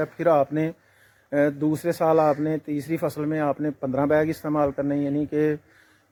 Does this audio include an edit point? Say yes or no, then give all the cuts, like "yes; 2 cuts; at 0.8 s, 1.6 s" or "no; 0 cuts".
no; 0 cuts